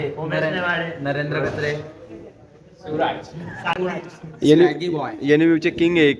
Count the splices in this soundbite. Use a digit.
0